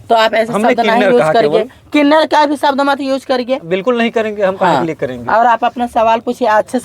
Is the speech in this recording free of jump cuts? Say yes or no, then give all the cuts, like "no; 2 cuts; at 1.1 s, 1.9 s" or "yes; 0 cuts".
yes; 0 cuts